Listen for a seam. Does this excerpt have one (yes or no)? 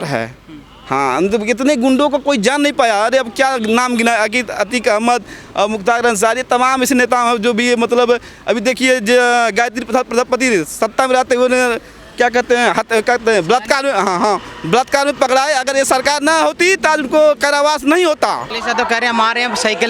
yes